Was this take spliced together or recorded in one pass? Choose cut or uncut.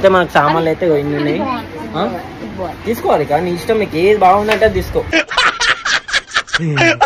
uncut